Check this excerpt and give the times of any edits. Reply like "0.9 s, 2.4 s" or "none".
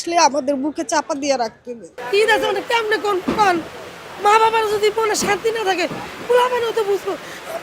2.0 s